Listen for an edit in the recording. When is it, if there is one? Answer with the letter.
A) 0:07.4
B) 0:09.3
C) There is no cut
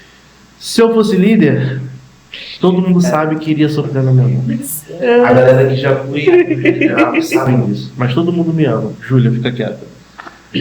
A